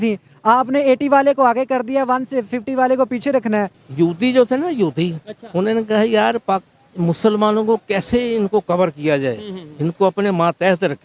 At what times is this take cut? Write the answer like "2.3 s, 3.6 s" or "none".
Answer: 3.8 s